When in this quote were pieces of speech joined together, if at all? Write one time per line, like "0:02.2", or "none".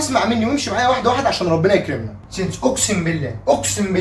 0:02.0